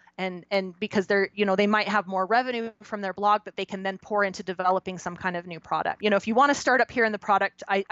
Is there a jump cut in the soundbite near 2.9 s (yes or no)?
no